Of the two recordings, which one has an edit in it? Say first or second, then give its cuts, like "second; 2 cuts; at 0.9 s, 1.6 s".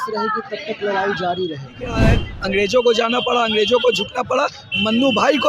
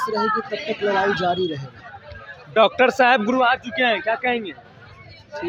first; 1 cut; at 2.0 s